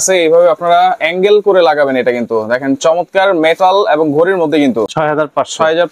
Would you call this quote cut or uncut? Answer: uncut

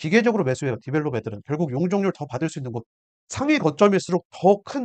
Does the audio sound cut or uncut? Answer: uncut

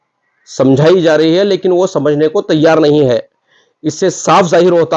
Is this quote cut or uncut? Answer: uncut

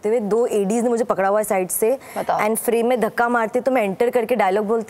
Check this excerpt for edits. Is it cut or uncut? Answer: uncut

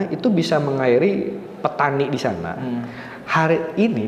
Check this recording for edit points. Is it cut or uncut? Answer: uncut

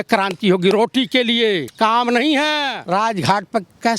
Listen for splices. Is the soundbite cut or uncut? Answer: cut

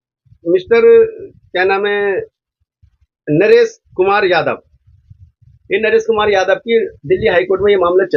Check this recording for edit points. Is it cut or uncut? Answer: uncut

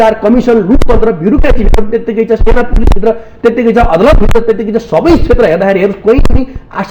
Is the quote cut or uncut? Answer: uncut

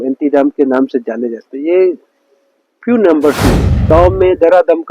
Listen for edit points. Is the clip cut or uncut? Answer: cut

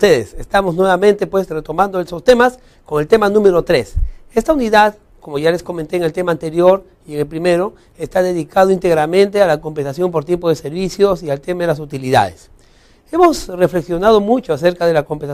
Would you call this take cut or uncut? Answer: cut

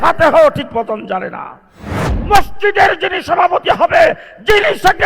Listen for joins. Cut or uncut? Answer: cut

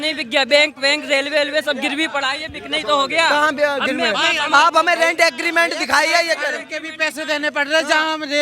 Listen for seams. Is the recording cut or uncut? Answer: uncut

